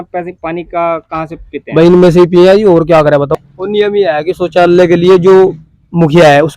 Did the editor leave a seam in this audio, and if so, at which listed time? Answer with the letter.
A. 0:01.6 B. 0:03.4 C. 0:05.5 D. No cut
B